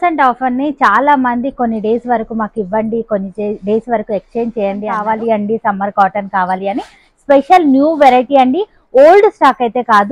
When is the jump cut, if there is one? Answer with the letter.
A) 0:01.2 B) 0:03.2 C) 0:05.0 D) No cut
C